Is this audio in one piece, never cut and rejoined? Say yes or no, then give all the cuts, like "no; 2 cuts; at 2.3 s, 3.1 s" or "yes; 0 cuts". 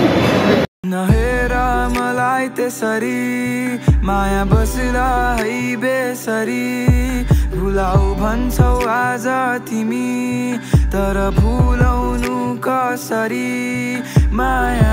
yes; 0 cuts